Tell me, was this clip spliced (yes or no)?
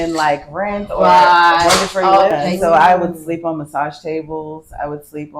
yes